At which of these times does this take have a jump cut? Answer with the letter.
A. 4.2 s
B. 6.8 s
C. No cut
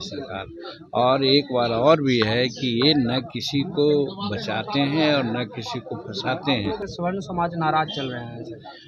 B